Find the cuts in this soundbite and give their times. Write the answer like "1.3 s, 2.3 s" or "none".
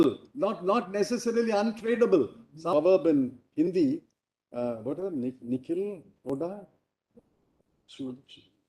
2.7 s